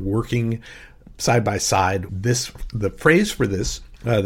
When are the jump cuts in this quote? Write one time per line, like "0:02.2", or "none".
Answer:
0:02.1